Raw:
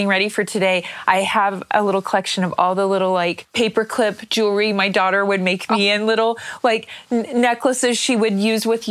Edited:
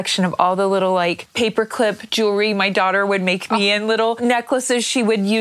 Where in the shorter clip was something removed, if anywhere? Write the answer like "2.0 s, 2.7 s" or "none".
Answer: 4.2 s